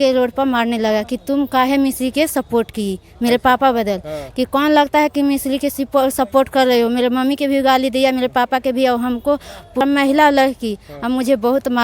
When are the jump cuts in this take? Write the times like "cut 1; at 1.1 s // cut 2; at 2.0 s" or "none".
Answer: cut 1; at 9.8 s